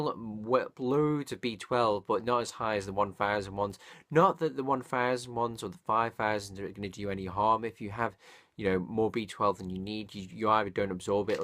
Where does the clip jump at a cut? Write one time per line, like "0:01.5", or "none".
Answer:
0:07.8